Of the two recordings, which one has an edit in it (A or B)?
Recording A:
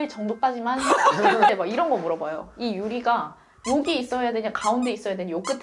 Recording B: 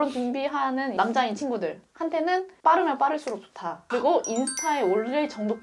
A